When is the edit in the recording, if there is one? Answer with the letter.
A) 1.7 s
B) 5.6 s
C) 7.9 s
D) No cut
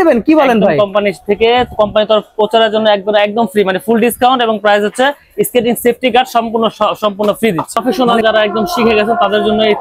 C